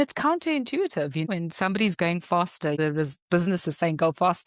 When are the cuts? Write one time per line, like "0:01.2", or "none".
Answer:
0:01.3
0:02.8